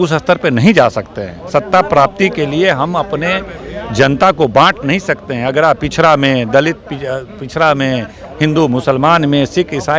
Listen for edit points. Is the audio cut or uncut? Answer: uncut